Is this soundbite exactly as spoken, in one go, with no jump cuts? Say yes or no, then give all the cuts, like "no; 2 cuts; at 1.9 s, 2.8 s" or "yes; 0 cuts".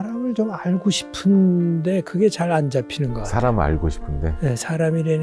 yes; 0 cuts